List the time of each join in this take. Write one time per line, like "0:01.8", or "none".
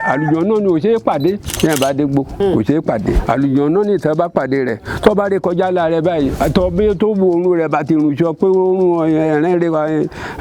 0:01.5
0:02.3
0:03.2
0:06.3